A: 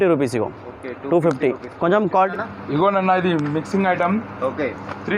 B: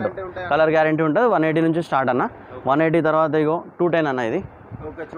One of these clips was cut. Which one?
A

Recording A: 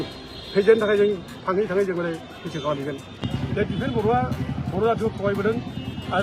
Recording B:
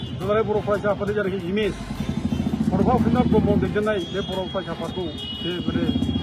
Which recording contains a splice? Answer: A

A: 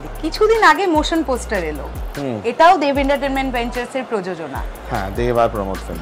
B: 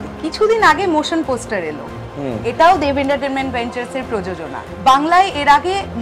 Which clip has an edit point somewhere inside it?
B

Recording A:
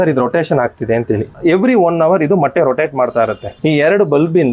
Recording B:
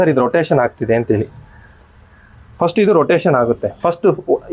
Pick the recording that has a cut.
A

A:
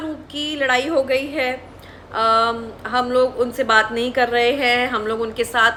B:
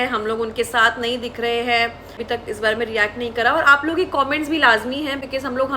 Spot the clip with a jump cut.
B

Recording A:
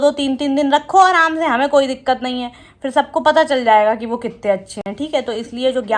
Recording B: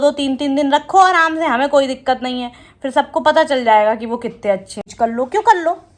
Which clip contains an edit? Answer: B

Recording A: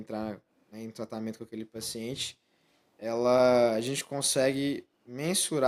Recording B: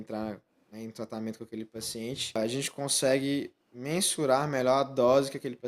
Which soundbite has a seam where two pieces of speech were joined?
B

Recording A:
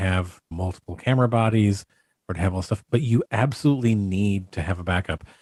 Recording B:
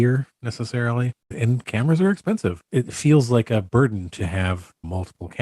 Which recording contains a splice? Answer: B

